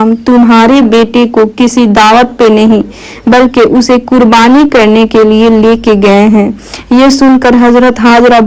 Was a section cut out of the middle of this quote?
no; 0 cuts

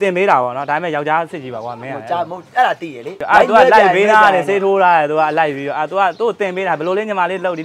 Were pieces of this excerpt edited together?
yes; 1 cut; at 3.2 s

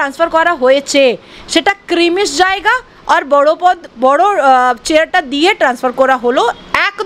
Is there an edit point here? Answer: no; 0 cuts

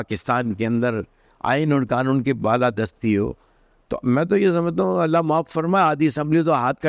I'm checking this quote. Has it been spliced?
no; 0 cuts

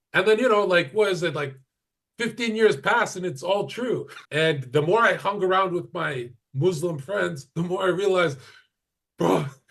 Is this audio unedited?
no; 1 cut; at 4.2 s

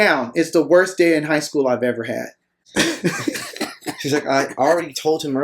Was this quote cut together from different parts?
yes; 1 cut; at 2.6 s

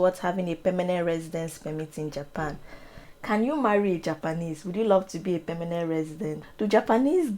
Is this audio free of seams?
no; 2 cuts; at 3.1 s, 6.5 s

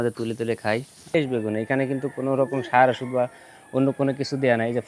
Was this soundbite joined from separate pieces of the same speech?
yes; 1 cut; at 1.1 s

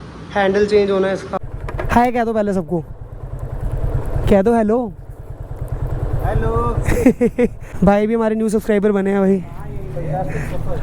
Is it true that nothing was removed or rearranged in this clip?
no; 2 cuts; at 1.4 s, 7.6 s

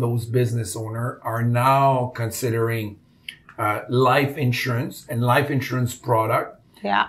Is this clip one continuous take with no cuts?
yes; 0 cuts

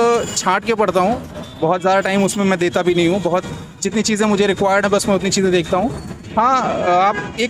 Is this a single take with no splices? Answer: yes; 0 cuts

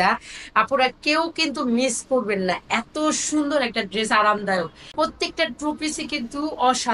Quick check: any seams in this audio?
yes; 1 cut; at 4.9 s

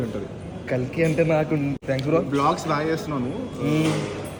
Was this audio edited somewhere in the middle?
no; 0 cuts

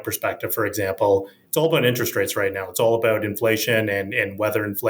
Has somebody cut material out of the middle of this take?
no; 0 cuts

